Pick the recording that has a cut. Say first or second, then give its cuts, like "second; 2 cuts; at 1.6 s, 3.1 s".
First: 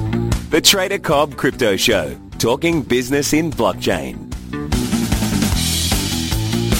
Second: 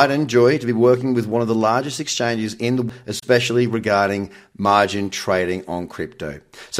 second; 1 cut; at 2.9 s